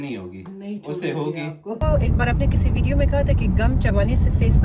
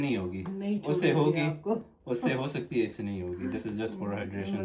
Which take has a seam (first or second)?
first